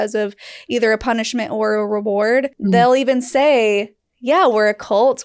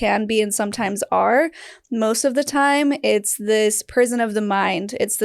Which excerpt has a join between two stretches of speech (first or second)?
first